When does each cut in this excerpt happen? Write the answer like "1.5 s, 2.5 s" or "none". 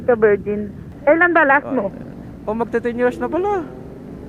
1.0 s